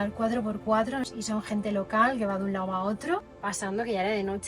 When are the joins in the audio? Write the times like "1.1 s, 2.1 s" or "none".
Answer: 1.0 s, 3.3 s